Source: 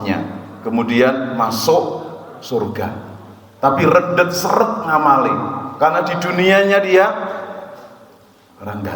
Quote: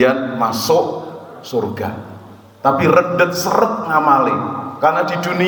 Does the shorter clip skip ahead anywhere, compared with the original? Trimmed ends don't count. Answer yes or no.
no